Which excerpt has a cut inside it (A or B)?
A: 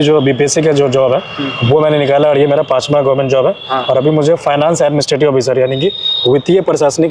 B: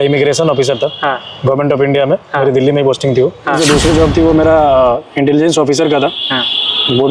B